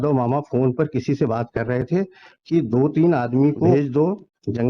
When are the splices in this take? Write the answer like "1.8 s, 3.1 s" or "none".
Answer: 3.7 s